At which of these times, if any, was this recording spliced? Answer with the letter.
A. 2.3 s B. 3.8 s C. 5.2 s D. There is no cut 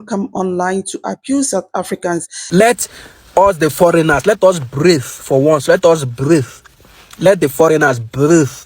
A